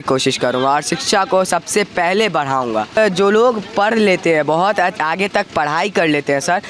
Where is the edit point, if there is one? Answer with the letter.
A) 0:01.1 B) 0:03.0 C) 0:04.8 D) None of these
B